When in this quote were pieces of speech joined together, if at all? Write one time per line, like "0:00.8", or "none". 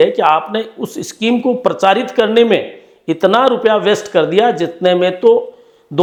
none